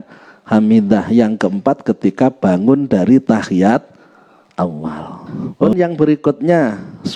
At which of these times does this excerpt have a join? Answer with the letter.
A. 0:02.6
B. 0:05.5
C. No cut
B